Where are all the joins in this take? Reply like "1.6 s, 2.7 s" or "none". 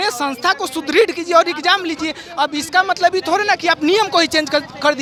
none